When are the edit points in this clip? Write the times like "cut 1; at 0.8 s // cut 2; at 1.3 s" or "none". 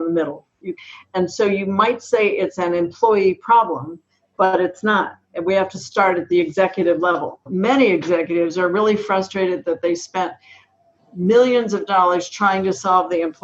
cut 1; at 0.9 s // cut 2; at 7.5 s